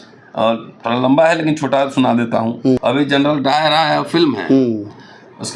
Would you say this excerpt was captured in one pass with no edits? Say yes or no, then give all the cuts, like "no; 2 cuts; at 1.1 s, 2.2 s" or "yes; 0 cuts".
no; 1 cut; at 2.8 s